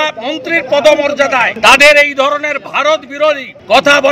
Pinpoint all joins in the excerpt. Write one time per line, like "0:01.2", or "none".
0:01.5